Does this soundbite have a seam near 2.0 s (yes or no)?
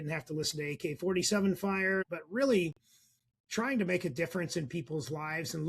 yes